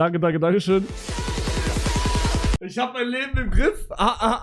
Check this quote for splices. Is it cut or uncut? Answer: cut